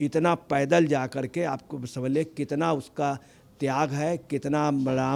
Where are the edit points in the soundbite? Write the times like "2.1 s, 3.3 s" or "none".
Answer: none